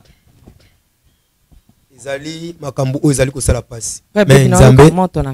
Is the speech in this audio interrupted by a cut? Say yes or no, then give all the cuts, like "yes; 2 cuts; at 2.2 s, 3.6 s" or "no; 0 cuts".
yes; 1 cut; at 4.0 s